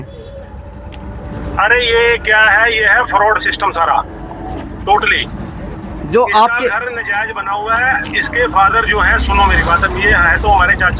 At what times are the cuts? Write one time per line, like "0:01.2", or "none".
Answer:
none